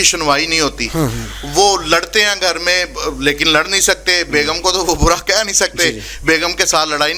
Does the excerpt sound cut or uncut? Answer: uncut